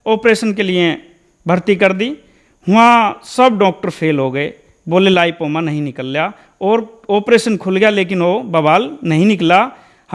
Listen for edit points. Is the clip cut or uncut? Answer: uncut